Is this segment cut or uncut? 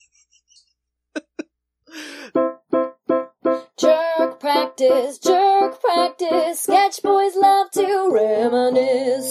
cut